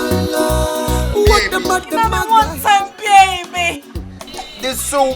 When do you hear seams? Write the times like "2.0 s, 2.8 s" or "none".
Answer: 1.9 s